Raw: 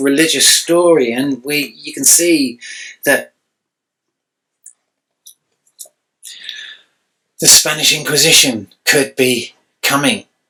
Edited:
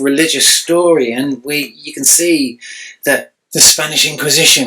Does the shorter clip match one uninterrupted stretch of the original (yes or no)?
no